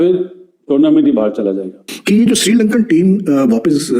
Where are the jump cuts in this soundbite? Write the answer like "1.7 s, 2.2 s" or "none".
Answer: 1.9 s